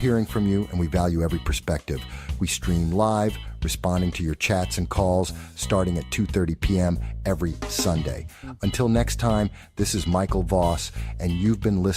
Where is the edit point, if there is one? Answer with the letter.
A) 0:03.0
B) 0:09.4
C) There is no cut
A